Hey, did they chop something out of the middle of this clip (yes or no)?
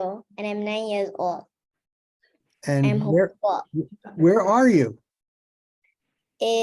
no